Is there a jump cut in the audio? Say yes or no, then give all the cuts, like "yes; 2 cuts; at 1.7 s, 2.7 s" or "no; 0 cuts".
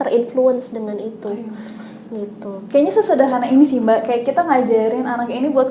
no; 0 cuts